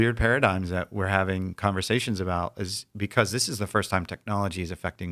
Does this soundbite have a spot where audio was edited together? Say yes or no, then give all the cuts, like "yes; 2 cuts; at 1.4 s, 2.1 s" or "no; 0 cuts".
no; 0 cuts